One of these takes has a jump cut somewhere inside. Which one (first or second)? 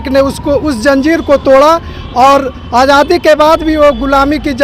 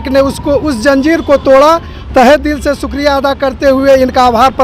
second